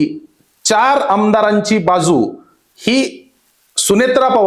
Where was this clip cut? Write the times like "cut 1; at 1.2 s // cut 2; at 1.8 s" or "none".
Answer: none